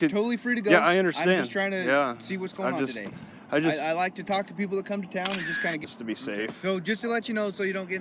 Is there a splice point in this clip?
yes; 1 cut; at 5.8 s

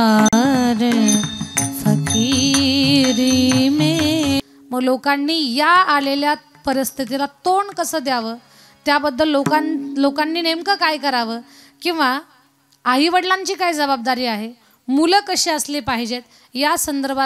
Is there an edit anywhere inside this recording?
yes; 1 cut; at 4.4 s

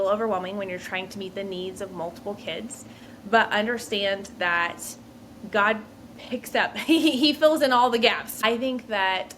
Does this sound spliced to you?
yes; 1 cut; at 8.3 s

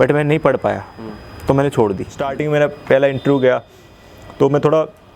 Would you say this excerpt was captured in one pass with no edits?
no; 1 cut; at 2.3 s

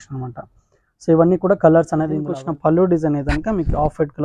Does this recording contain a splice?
yes; 1 cut; at 2.3 s

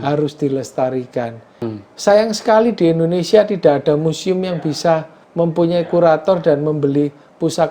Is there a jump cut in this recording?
yes; 2 cuts; at 1.7 s, 5.2 s

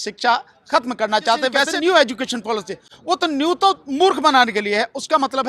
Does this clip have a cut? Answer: yes; 1 cut; at 1.5 s

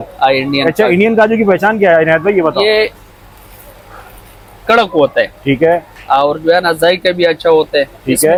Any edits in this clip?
no; 0 cuts

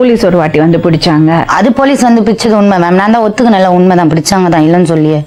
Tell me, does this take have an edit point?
no; 0 cuts

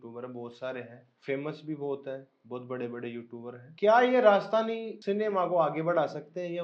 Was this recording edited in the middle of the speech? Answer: yes; 3 cuts; at 1.0 s, 3.6 s, 4.9 s

